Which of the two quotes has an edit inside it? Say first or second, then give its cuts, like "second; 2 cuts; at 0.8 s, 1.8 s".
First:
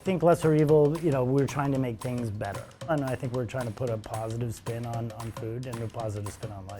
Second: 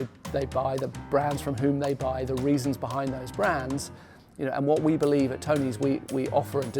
first; 1 cut; at 2.9 s